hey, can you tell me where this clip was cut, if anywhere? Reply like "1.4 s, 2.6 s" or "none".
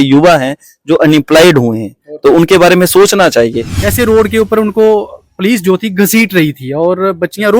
3.8 s

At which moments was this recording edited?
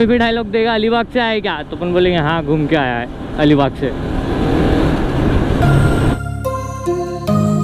none

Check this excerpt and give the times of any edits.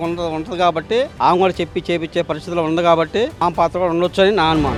none

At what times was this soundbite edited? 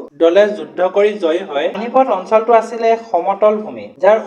1.8 s

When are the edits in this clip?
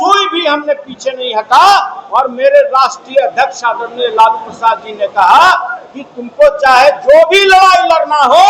none

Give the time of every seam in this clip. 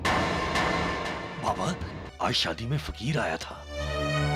2.0 s

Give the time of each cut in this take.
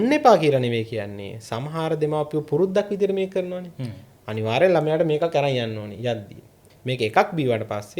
6.6 s

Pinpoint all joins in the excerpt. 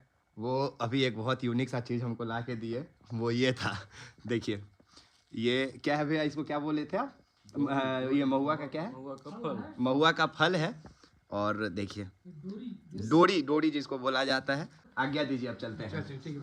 14.9 s

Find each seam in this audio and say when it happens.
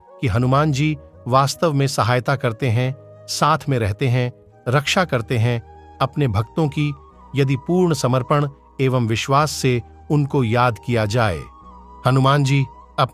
none

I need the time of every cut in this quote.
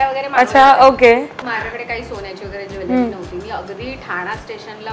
1.4 s

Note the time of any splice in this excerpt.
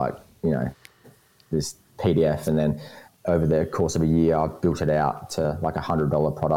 3.1 s

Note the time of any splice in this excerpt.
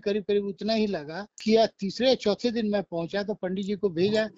1.4 s

